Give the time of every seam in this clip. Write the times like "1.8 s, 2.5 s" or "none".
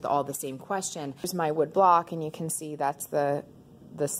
1.3 s